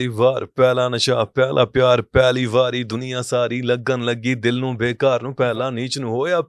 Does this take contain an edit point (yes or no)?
no